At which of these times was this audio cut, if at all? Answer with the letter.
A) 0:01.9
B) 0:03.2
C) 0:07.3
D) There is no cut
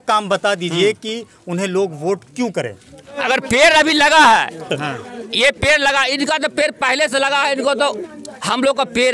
B